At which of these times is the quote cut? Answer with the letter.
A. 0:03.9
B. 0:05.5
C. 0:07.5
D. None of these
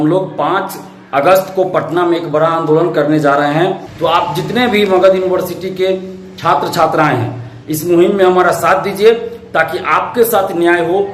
A